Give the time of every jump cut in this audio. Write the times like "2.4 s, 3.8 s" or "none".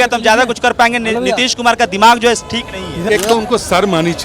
3.1 s